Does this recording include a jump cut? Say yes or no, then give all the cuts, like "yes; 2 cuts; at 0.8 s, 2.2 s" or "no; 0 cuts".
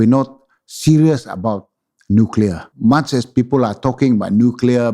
yes; 1 cut; at 2.7 s